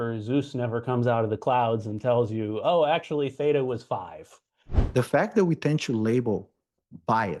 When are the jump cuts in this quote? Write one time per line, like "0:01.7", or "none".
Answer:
0:04.8